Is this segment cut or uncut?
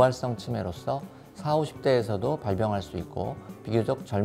uncut